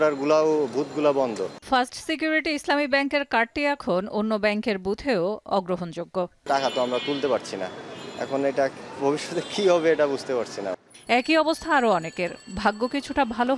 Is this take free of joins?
yes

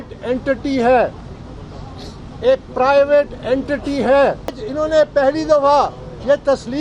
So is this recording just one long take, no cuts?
no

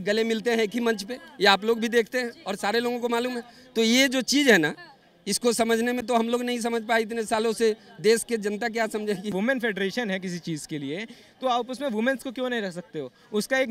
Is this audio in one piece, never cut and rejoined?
no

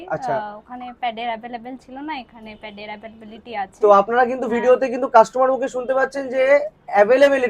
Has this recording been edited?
no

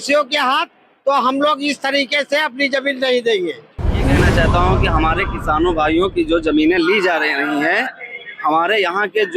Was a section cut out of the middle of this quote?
yes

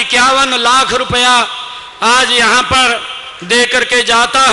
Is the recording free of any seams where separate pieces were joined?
yes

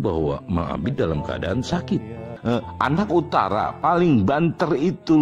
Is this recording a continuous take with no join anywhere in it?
no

